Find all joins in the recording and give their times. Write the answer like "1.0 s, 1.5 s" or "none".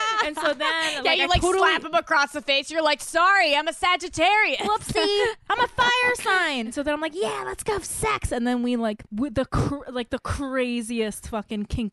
6.7 s, 9.0 s

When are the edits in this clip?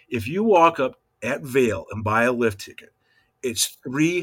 1.1 s

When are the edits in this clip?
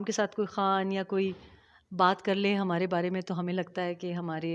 none

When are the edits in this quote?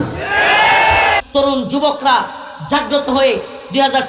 1.2 s

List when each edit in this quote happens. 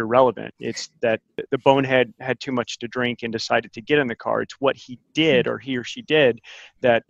1.3 s

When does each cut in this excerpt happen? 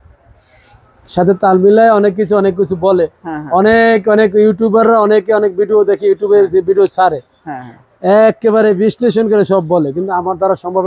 none

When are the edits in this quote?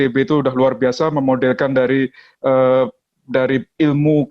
none

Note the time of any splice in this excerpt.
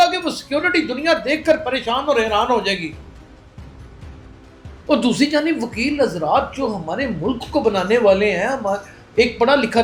none

